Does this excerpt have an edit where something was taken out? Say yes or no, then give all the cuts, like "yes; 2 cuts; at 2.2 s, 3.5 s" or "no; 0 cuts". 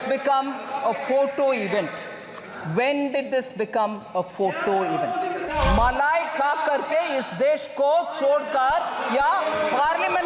yes; 1 cut; at 5.4 s